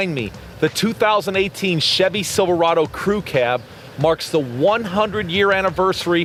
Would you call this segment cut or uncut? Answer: uncut